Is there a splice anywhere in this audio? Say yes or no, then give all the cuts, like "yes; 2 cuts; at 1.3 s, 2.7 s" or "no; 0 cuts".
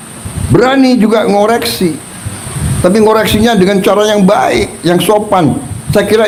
no; 0 cuts